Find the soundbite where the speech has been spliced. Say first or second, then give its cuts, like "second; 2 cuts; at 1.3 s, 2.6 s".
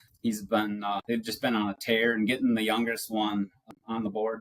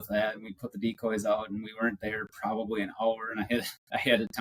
first; 2 cuts; at 1.0 s, 3.6 s